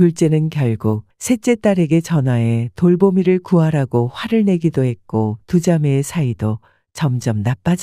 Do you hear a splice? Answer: yes; 1 cut; at 1.1 s

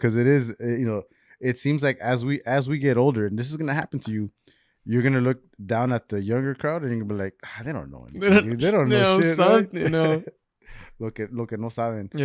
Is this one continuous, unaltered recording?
yes; 0 cuts

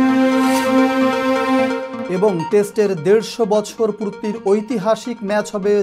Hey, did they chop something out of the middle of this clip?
yes; 1 cut; at 1.9 s

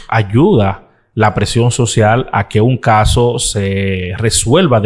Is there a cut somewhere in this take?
no; 0 cuts

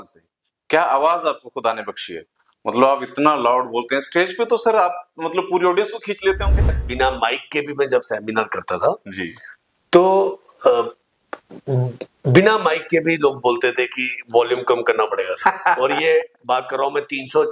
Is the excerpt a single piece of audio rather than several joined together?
no; 1 cut; at 6.8 s

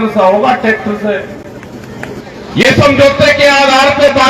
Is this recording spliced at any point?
yes; 1 cut; at 2.2 s

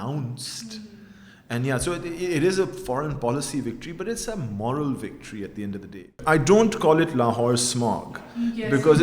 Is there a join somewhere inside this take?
yes; 1 cut; at 6.2 s

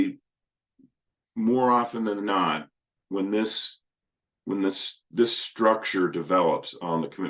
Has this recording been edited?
no; 0 cuts

